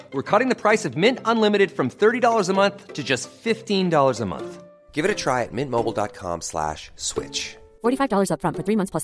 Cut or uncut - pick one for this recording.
uncut